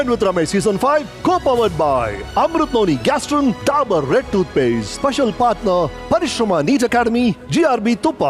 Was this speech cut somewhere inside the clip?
yes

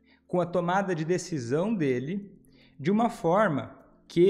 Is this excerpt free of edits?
yes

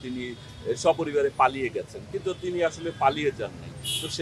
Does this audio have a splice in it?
no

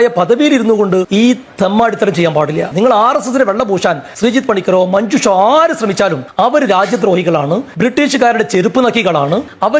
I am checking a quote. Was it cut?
yes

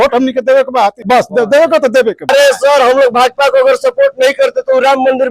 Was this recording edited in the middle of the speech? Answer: yes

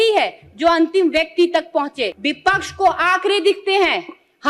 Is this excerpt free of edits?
no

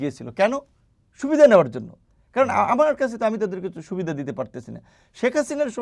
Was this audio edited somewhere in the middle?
no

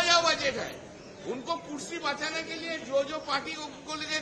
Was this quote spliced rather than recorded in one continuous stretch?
no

